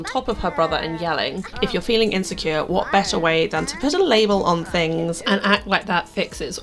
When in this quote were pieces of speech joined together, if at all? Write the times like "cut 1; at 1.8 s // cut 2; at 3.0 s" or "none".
cut 1; at 1.5 s // cut 2; at 5.2 s